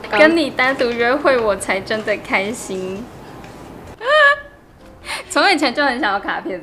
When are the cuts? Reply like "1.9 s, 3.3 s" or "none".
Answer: none